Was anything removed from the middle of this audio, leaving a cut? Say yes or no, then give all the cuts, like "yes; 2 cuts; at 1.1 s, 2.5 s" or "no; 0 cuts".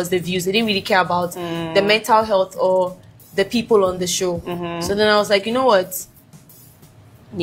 no; 0 cuts